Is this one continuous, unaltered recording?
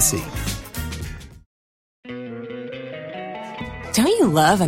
no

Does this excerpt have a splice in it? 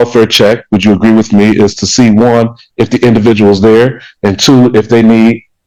no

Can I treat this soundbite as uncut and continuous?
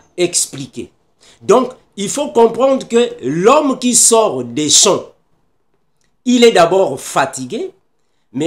yes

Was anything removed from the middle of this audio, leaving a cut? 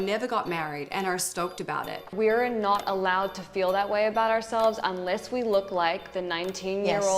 yes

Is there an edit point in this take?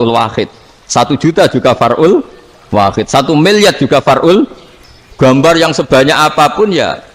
no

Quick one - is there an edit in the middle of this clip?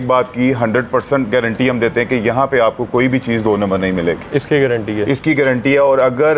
no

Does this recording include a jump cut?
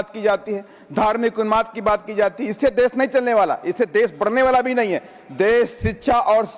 no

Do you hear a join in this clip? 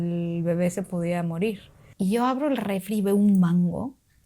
yes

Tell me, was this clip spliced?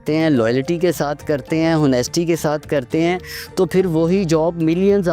no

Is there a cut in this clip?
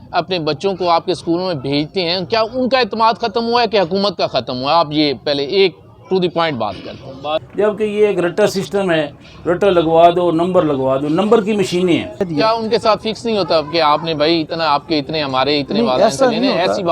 yes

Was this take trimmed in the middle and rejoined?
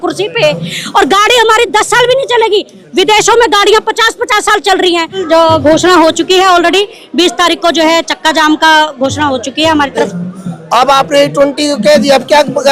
yes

